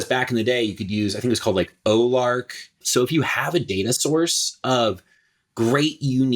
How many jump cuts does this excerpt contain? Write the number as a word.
one